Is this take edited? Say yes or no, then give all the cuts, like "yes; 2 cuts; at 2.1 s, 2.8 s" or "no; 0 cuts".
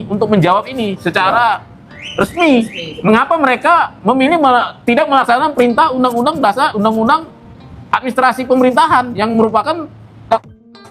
no; 0 cuts